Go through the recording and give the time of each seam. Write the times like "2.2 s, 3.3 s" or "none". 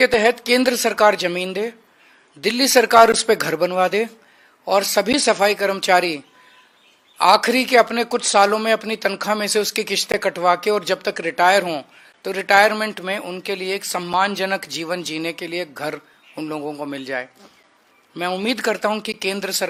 none

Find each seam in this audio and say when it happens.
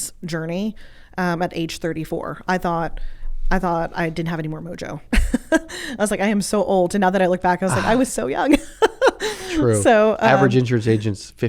none

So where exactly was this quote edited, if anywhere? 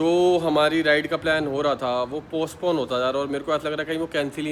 none

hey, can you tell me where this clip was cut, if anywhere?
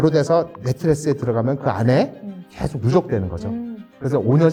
none

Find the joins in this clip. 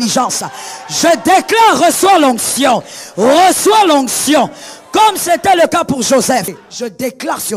6.5 s

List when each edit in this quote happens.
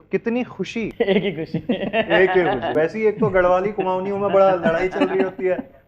0.9 s, 2.7 s

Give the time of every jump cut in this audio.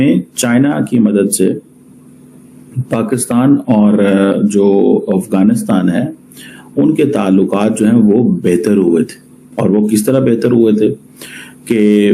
none

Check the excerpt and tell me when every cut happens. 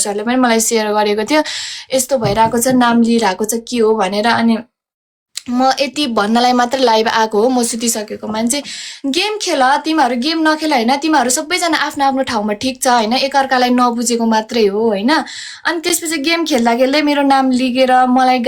none

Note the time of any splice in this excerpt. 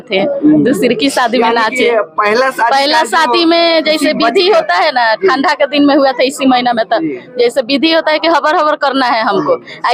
none

